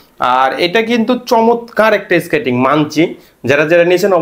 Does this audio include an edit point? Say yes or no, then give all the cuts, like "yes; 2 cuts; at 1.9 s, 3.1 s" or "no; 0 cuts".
no; 0 cuts